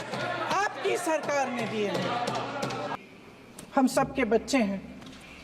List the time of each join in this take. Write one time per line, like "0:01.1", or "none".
0:02.9